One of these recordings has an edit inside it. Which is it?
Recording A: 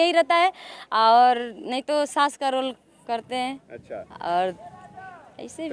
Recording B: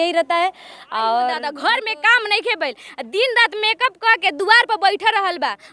B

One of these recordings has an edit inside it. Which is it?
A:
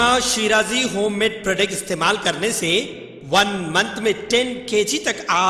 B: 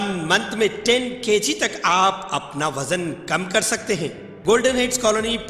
B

